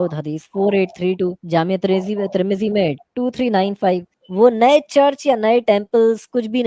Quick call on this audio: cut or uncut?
cut